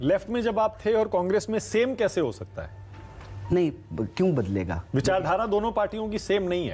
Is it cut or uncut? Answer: uncut